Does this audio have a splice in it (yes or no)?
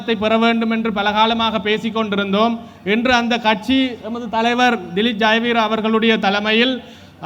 no